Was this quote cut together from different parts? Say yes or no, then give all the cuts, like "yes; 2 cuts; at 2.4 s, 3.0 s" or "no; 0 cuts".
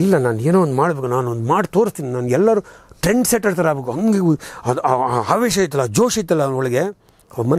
no; 0 cuts